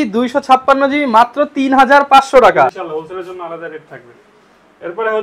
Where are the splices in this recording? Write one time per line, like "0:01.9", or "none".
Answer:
0:02.9